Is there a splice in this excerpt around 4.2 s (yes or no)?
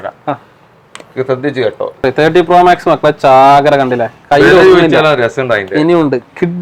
no